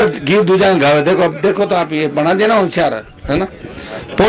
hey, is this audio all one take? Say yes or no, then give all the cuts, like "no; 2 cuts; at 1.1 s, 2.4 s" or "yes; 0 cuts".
yes; 0 cuts